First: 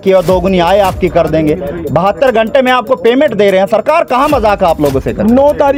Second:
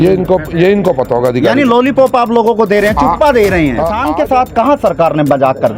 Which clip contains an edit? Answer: second; 1 cut; at 4.0 s

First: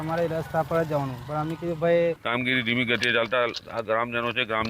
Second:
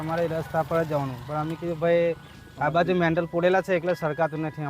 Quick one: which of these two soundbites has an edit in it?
first; 1 cut; at 2.2 s

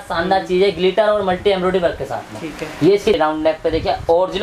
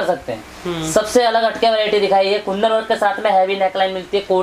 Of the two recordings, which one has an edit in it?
first; 1 cut; at 3.2 s

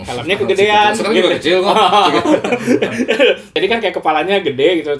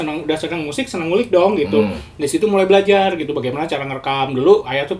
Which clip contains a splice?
first; 1 cut; at 3.5 s

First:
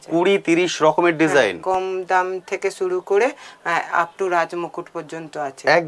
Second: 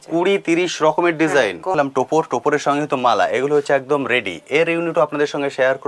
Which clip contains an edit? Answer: second; 1 cut; at 1.7 s

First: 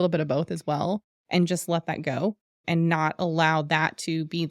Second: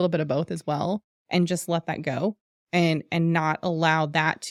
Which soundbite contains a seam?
first; 1 cut; at 2.6 s

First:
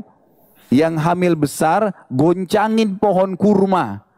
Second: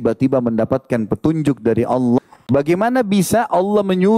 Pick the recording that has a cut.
second; 1 cut; at 2.2 s

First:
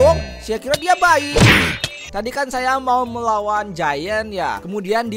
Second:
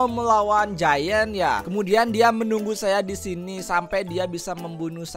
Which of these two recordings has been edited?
first; 1 cut; at 2.1 s

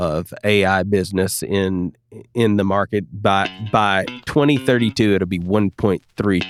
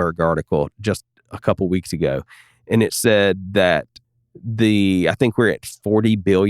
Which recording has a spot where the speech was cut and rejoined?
second; 1 cut; at 4.0 s

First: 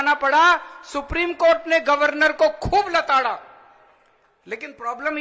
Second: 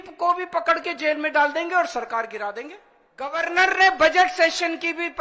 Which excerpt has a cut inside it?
second; 1 cut; at 3.4 s

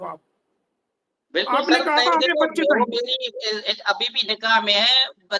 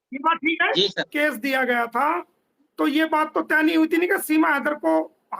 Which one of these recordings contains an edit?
second; 1 cut; at 1.1 s

